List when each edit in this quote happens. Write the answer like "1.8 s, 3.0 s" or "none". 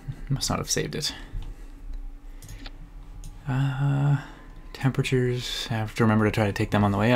3.8 s